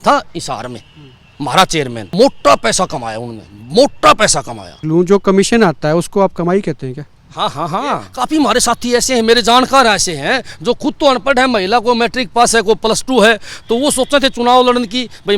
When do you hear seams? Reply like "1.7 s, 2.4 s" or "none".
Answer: 2.1 s, 4.8 s, 8.1 s